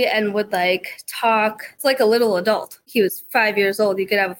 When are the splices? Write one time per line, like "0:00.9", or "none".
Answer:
0:01.8
0:02.8